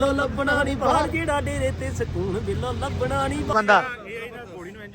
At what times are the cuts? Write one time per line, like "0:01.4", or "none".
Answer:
0:03.5